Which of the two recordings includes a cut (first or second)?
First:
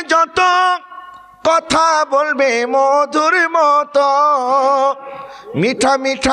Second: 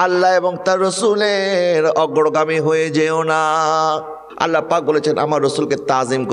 second